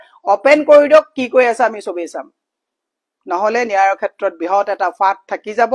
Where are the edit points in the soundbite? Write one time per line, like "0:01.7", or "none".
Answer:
none